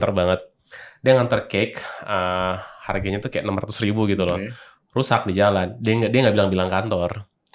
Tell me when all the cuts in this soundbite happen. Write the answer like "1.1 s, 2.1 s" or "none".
none